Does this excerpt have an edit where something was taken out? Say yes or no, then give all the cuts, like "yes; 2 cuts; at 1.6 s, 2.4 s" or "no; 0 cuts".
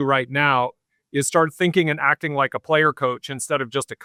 no; 0 cuts